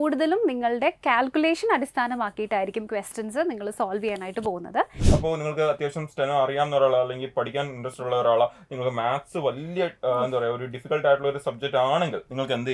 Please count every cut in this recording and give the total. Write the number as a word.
one